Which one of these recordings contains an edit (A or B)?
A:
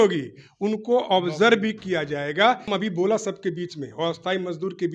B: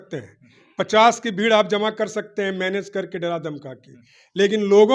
A